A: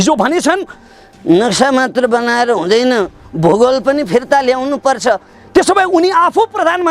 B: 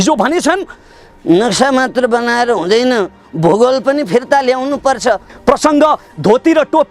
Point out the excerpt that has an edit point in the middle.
B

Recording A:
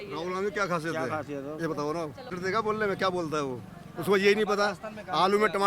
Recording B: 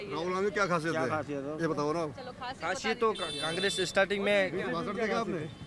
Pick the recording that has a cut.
A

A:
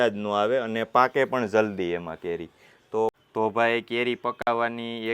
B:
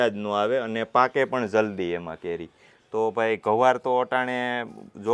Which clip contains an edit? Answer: A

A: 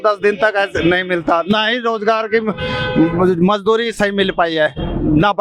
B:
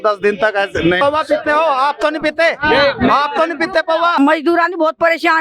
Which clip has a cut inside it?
B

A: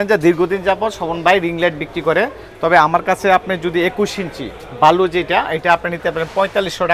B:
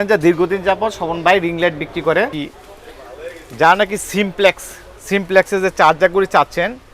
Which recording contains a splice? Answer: B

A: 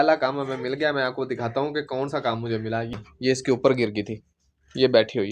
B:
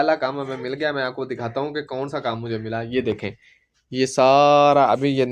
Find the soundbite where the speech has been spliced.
A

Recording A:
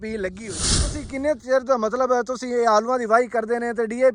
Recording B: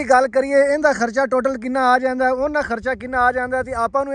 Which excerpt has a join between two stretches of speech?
A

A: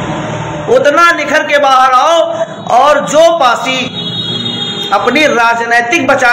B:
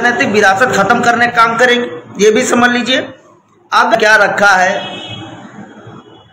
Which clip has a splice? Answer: B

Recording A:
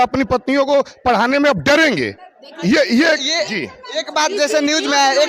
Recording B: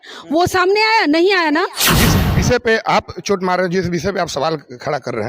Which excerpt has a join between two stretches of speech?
B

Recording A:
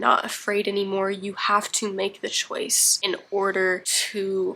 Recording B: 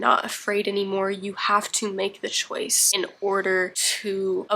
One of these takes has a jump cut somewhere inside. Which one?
B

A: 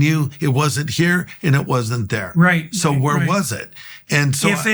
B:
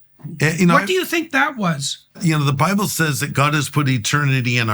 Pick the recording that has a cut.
B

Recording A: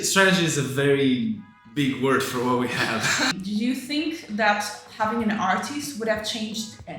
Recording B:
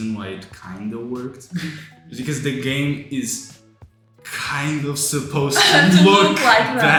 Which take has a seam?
A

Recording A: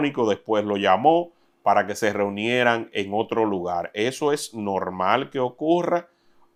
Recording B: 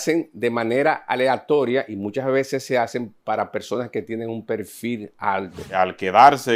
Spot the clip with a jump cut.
B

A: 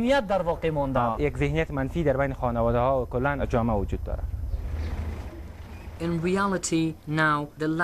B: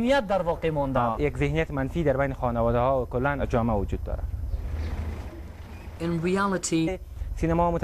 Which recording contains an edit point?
A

